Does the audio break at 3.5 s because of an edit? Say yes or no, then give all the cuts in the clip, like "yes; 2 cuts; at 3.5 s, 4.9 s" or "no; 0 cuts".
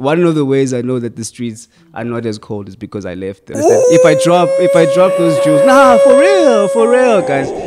yes; 1 cut; at 3.5 s